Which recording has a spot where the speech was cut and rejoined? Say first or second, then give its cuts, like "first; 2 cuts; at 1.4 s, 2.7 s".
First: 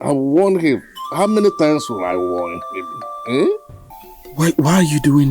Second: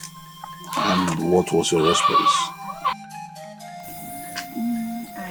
first; 1 cut; at 3.8 s